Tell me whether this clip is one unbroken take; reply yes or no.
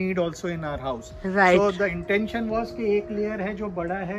yes